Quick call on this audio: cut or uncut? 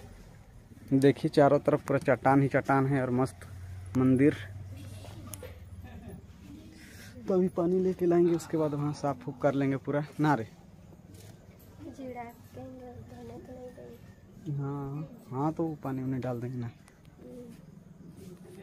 uncut